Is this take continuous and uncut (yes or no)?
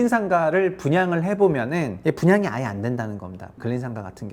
no